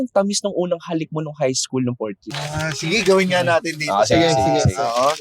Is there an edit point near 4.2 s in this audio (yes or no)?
no